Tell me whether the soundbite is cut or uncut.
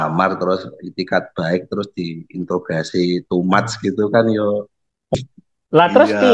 cut